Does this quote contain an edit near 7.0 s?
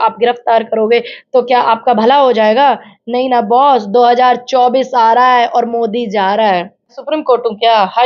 yes; 1 cut; at 7.0 s

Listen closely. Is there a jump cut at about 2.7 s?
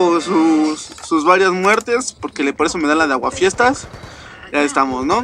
yes; 1 cut; at 2.7 s

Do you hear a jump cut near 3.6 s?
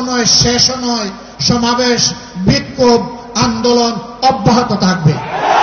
no; 0 cuts

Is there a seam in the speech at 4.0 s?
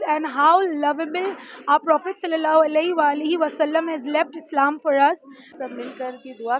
no; 1 cut; at 5.5 s

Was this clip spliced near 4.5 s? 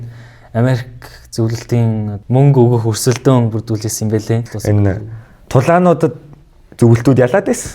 yes; 1 cut; at 4.5 s

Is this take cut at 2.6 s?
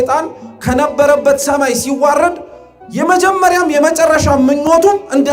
no; 0 cuts

